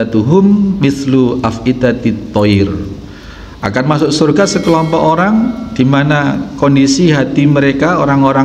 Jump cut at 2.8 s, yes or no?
yes